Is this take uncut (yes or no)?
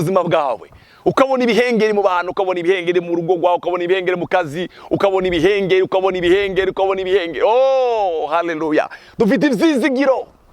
yes